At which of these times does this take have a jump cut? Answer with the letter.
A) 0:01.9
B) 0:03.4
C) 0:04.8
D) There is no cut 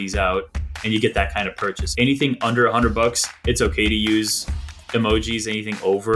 A